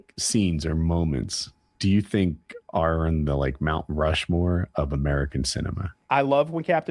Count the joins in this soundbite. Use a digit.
1